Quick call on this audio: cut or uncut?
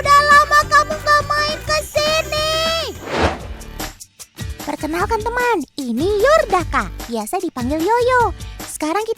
uncut